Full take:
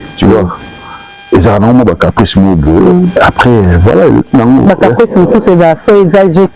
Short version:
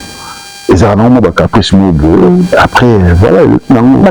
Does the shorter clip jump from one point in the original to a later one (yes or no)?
no